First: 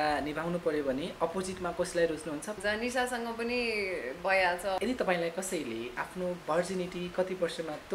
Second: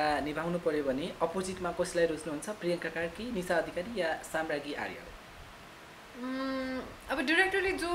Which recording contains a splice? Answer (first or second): first